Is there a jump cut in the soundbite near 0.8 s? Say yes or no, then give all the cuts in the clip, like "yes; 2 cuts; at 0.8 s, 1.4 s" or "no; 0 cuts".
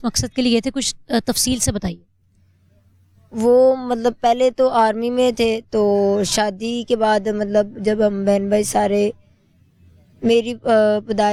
no; 0 cuts